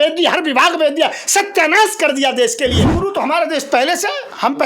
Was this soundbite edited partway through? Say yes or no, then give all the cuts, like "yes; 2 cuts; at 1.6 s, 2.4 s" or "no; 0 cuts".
yes; 1 cut; at 3.0 s